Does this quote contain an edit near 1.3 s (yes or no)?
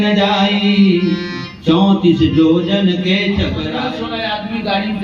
no